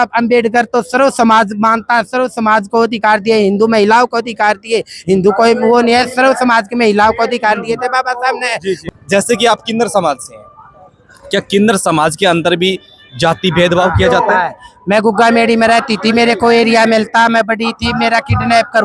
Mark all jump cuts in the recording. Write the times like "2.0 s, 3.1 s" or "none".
8.8 s

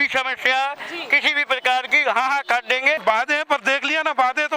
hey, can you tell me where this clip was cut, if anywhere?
3.0 s

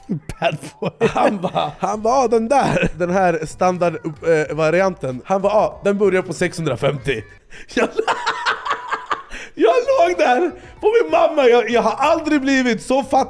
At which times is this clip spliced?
1.7 s, 2.9 s, 5.1 s

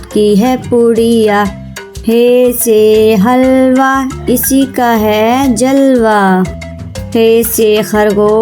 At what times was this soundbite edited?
none

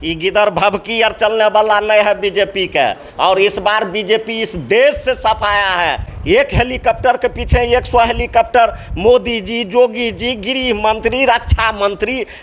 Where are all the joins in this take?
6.1 s

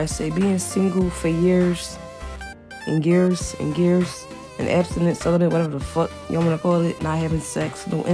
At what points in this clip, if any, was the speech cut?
none

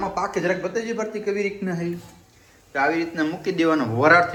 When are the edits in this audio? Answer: none

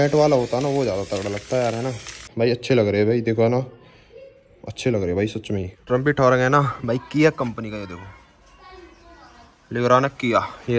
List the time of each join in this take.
2.2 s, 5.8 s

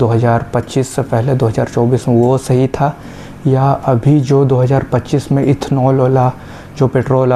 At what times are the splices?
none

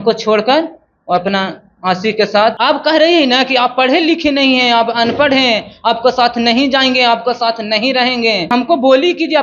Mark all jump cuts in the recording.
2.6 s, 8.5 s

